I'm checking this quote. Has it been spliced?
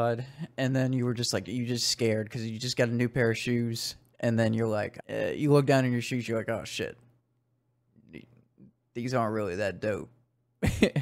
yes; 1 cut; at 5.0 s

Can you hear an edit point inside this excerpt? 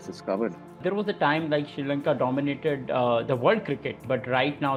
no; 0 cuts

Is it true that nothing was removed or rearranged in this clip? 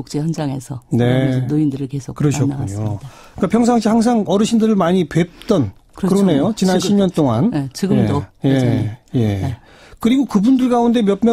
yes; 0 cuts

